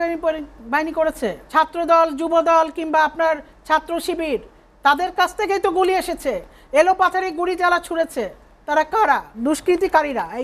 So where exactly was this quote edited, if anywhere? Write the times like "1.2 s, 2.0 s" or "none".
1.4 s, 9.4 s